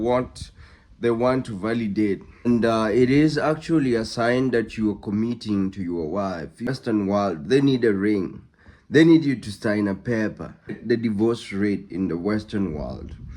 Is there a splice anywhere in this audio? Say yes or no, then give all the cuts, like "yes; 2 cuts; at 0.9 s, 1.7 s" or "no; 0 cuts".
yes; 3 cuts; at 2.5 s, 6.7 s, 10.8 s